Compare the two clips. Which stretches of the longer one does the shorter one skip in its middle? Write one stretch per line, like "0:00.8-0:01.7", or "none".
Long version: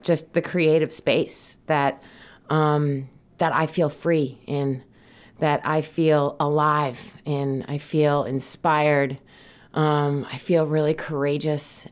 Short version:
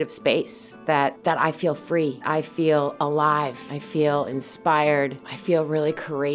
0:02.0-0:03.3
0:04.4-0:05.6
0:07.1-0:07.7
0:09.3-0:10.3